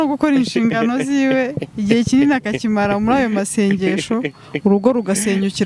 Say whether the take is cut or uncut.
uncut